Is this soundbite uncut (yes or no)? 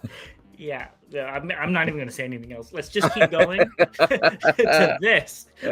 yes